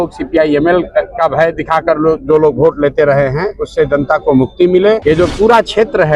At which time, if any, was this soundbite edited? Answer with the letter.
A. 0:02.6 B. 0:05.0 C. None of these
B